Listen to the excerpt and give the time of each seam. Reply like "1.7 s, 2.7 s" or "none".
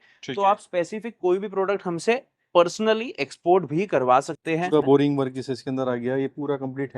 4.7 s